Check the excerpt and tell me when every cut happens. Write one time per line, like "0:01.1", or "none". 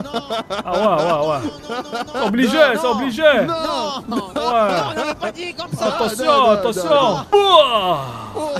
0:07.3